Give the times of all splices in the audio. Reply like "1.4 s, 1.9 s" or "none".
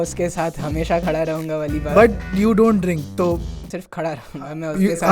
3.6 s